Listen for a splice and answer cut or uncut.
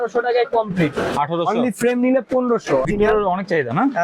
cut